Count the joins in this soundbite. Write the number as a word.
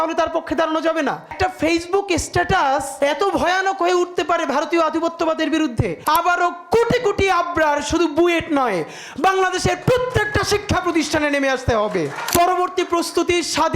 four